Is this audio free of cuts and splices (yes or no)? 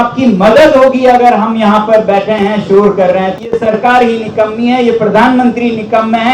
no